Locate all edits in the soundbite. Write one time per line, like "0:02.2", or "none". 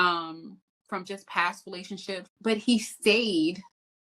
0:02.3